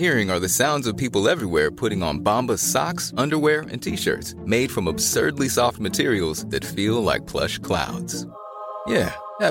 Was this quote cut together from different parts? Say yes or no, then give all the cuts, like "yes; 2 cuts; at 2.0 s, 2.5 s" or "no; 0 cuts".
no; 0 cuts